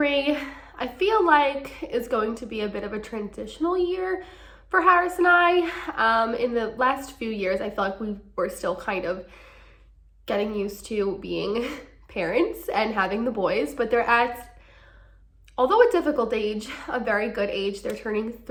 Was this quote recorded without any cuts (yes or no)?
yes